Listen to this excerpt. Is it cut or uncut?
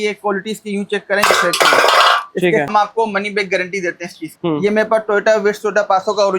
cut